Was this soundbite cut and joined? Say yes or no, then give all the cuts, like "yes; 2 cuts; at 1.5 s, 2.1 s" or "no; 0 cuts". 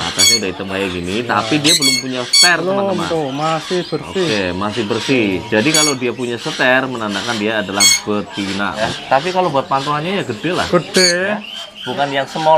yes; 1 cut; at 8.9 s